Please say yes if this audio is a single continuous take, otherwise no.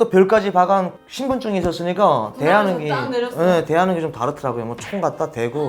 yes